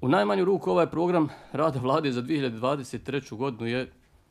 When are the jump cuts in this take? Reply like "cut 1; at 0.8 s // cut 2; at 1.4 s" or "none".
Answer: none